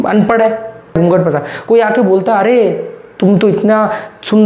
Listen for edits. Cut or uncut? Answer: cut